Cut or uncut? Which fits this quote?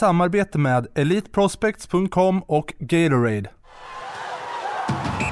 cut